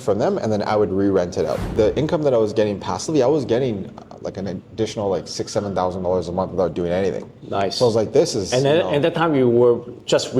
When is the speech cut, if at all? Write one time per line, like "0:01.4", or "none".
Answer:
0:01.7